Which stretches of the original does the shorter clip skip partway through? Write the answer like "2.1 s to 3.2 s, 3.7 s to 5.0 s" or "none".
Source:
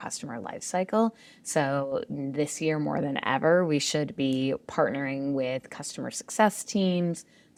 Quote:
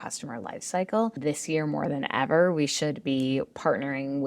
1.2 s to 2.3 s